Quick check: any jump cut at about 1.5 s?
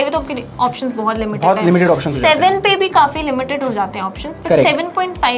no; 0 cuts

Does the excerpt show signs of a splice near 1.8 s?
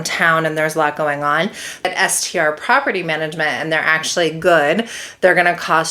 yes; 1 cut; at 1.8 s

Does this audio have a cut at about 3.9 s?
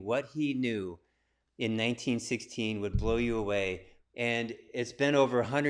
yes; 1 cut; at 3.9 s

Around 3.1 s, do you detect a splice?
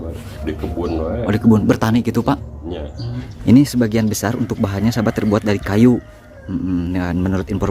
yes; 1 cut; at 3.1 s

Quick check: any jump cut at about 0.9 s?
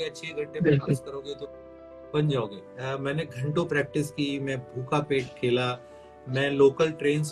no; 1 cut; at 2.7 s

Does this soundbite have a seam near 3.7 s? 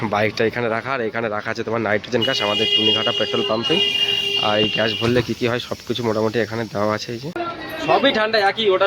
no; 1 cut; at 7.4 s

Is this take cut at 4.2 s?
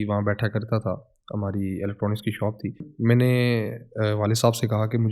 no; 1 cut; at 2.9 s

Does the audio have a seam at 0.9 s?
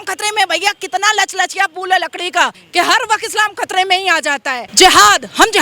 no; 2 cuts; at 2.6 s, 4.6 s

